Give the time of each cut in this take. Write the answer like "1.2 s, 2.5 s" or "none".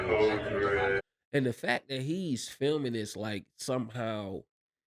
none